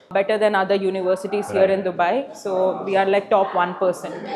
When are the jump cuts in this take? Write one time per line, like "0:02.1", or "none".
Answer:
none